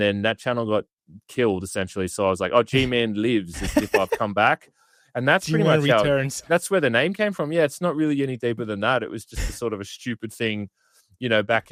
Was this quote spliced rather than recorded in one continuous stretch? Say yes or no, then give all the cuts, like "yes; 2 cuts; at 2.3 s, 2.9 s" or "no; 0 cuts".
no; 0 cuts